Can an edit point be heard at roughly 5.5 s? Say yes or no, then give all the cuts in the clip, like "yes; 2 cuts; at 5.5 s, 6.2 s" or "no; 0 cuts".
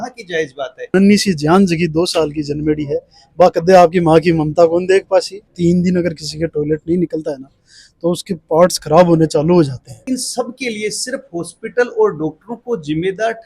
yes; 3 cuts; at 0.9 s, 5.5 s, 9.9 s